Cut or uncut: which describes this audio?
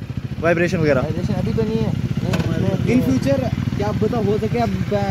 uncut